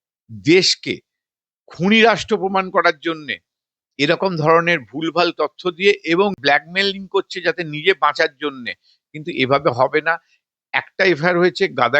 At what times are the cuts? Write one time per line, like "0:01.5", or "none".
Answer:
0:06.4